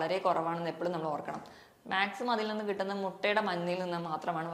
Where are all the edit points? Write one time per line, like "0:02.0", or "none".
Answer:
none